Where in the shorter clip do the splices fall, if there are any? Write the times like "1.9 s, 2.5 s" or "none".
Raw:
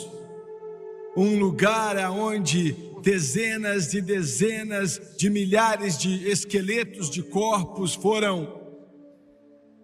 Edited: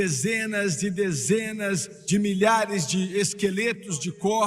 none